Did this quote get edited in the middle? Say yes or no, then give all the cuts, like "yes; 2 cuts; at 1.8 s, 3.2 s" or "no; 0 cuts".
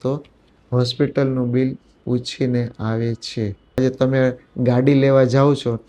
yes; 1 cut; at 3.8 s